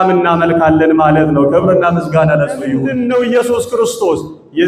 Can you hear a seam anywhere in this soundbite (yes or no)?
yes